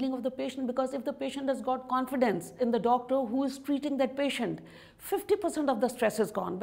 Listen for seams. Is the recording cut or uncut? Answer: cut